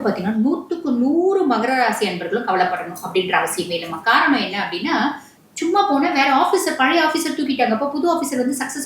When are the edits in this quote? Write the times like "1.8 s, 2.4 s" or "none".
5.3 s